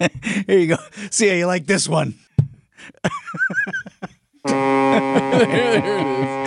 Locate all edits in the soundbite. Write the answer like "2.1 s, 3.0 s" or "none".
2.2 s